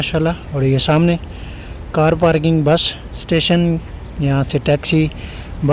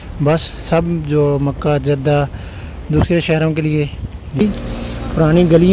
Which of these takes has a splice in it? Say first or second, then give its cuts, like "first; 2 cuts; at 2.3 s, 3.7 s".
second; 1 cut; at 4.4 s